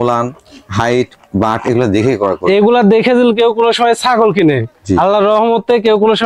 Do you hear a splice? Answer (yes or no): no